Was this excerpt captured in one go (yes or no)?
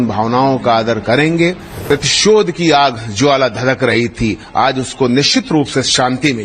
no